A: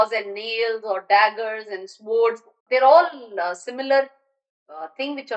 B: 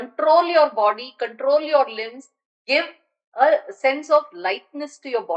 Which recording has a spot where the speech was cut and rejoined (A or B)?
A